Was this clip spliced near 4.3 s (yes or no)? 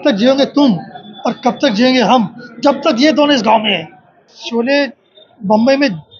yes